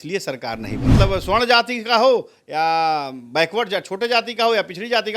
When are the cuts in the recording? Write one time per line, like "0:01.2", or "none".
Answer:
0:00.9